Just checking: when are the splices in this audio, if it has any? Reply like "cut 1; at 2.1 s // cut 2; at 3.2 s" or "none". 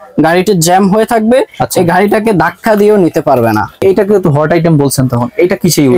cut 1; at 3.8 s